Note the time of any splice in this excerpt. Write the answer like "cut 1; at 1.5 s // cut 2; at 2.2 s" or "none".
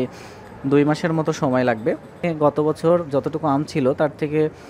cut 1; at 2.2 s